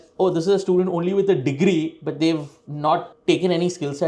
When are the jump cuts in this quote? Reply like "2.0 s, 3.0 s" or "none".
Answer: none